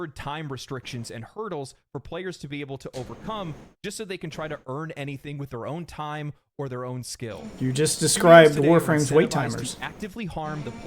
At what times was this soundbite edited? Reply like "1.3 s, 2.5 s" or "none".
none